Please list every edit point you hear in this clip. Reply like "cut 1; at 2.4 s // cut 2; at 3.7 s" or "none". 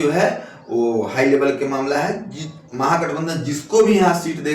none